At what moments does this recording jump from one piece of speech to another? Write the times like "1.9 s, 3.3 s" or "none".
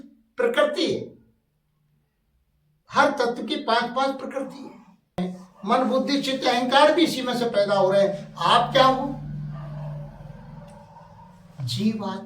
5.2 s